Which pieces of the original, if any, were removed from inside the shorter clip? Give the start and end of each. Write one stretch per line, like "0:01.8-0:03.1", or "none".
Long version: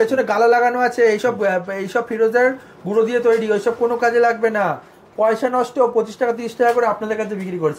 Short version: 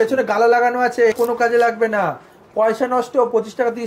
0:01.1-0:03.8

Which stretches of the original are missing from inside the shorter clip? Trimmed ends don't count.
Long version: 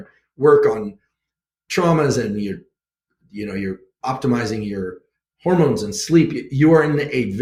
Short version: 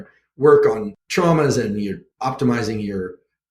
0:01.0-0:01.6
0:02.7-0:03.9

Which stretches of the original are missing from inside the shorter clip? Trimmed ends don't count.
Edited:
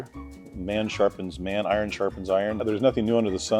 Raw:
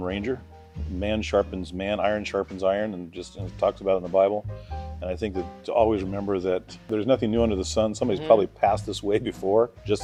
0:02.9-0:06.8

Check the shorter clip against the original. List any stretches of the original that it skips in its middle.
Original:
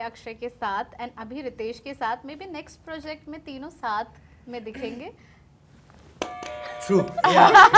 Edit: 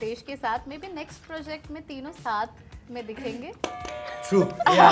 0:05.1-0:06.1

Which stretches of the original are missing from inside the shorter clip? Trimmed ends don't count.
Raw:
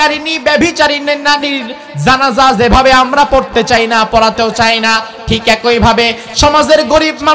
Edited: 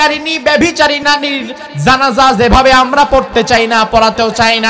0:01.0-0:01.2

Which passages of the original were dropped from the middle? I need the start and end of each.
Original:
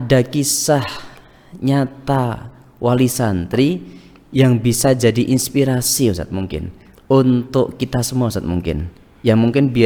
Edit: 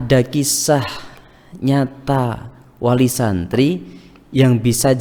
none

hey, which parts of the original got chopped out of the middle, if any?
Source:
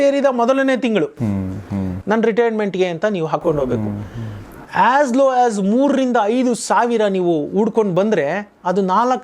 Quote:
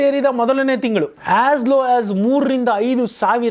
0:01.1-0:04.6

